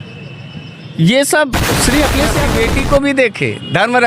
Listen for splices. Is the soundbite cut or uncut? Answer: cut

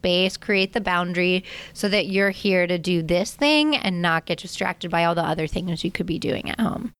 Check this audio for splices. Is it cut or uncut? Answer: uncut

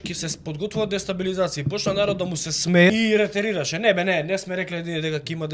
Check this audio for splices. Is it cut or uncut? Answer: cut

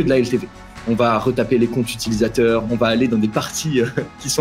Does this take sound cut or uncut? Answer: uncut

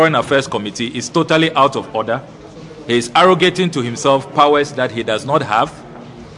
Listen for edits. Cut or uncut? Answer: uncut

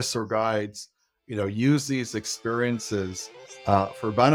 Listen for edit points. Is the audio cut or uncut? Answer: uncut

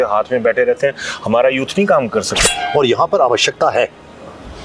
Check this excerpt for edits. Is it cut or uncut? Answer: cut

